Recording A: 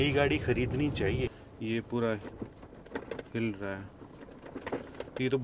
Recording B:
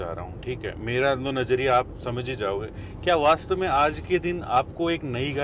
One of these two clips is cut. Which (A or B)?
A